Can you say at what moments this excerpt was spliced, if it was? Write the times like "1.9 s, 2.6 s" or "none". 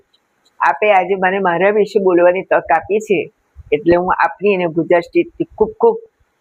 none